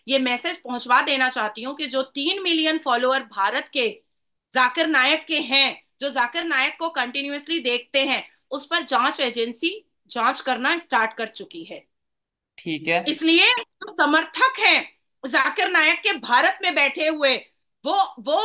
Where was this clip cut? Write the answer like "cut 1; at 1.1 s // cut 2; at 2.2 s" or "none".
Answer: none